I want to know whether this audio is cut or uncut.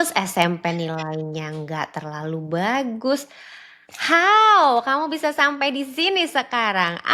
uncut